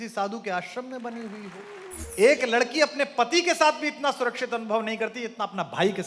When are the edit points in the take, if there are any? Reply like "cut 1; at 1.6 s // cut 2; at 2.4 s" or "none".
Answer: cut 1; at 1.8 s